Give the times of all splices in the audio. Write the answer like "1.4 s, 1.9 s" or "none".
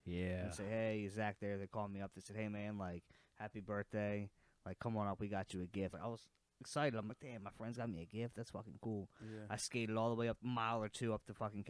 5.9 s, 10.4 s